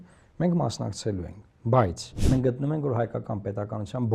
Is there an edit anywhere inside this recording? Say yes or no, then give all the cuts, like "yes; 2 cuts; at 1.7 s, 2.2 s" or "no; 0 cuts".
yes; 1 cut; at 2.1 s